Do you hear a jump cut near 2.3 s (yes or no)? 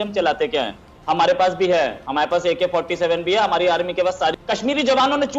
no